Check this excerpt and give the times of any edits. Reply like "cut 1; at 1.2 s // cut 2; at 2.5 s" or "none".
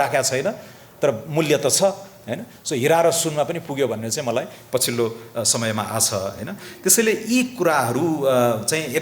none